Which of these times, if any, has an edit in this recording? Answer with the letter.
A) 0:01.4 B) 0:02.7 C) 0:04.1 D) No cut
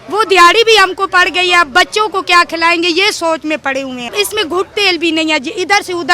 C